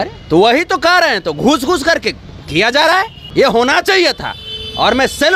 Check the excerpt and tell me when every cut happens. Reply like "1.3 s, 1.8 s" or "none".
3.2 s